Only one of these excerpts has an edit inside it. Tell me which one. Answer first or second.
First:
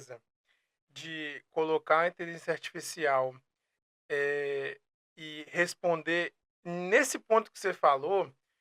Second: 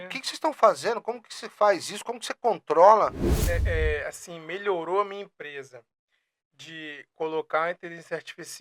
second